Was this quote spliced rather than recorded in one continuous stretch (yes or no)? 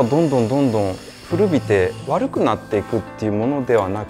yes